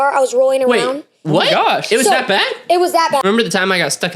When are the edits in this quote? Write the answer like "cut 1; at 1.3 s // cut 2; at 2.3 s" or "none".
cut 1; at 3.2 s